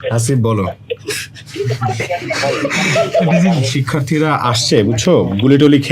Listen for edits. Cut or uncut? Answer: cut